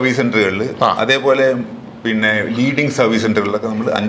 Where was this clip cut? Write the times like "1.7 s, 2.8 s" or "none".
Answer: none